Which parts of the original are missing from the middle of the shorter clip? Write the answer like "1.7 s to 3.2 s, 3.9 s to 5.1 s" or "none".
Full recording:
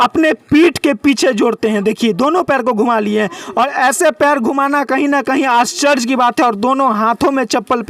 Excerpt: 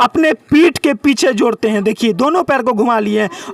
none

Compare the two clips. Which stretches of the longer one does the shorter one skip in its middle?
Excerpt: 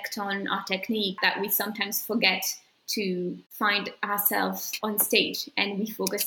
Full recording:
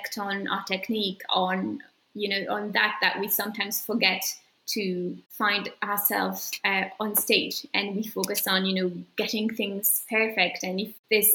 1.2 s to 3.0 s, 6.5 s to 6.9 s

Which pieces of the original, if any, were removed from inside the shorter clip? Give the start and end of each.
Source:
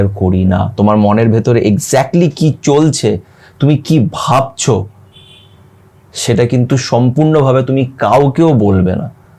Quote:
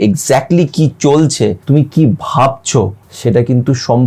3.2 s to 3.5 s, 5.0 s to 6.1 s

